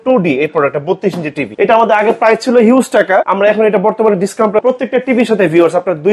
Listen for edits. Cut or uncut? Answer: cut